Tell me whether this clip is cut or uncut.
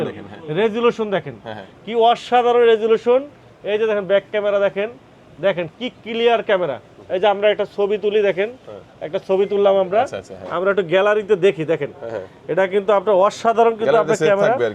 uncut